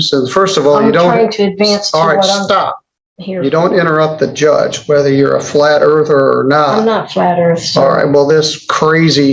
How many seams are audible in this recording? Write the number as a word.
zero